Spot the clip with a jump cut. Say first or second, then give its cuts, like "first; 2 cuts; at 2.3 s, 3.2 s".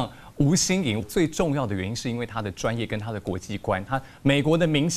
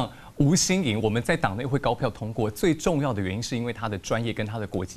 first; 1 cut; at 1.0 s